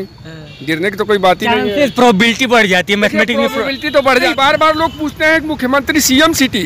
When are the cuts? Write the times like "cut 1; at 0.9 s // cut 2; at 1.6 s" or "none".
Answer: cut 1; at 4.3 s